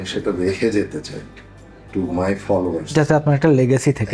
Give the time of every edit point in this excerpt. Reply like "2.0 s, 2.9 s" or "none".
none

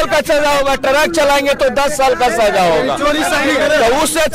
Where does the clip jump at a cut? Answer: none

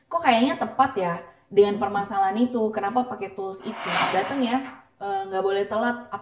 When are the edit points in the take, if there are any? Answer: 4.1 s

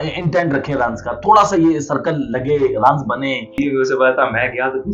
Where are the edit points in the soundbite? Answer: 3.6 s

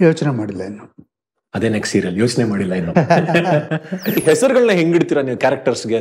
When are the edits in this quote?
4.2 s

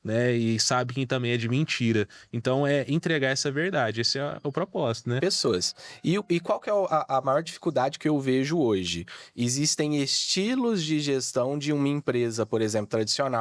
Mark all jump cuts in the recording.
5.2 s

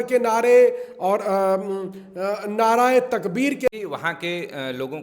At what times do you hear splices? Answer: 3.7 s

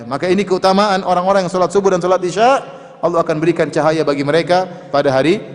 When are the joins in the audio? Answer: none

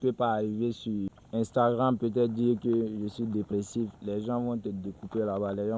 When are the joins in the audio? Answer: 1.2 s

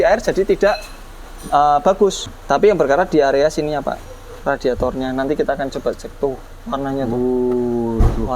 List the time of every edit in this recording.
2.3 s

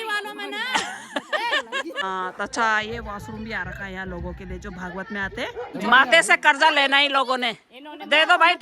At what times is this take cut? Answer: 2.0 s, 5.7 s

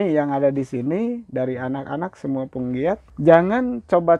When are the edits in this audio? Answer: 3.1 s

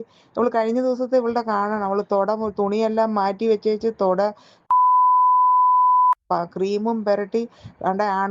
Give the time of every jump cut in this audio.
none

